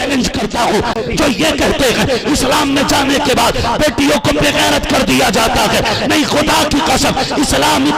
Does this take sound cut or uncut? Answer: cut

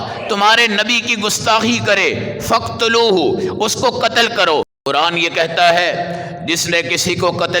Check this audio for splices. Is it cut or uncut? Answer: cut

